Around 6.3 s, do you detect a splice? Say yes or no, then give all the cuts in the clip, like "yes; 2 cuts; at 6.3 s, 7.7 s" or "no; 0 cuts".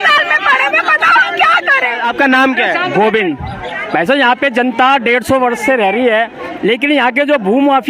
no; 1 cut; at 2.0 s